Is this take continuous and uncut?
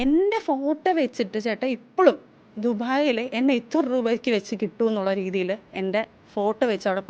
yes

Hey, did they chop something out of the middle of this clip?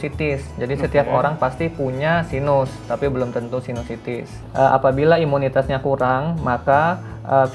yes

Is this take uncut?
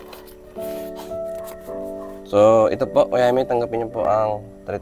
no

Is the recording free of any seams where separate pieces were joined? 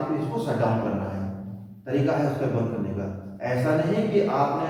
yes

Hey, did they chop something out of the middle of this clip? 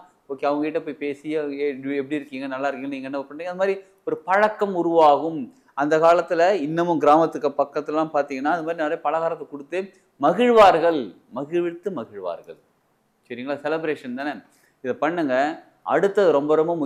no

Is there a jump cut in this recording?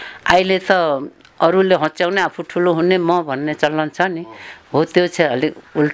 no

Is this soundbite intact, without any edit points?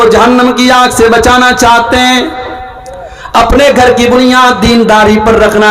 yes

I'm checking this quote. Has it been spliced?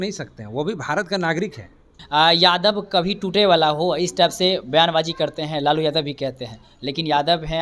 yes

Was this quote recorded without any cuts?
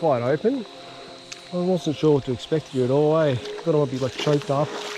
yes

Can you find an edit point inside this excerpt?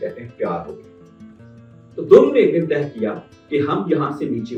no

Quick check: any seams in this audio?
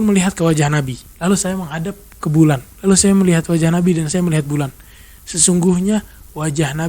yes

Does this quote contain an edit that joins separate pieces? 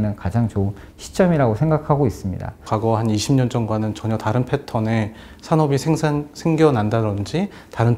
yes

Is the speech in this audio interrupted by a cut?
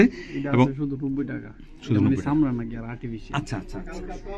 no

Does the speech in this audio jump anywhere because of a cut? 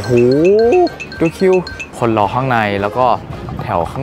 yes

